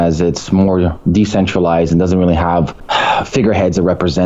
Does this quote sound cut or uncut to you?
cut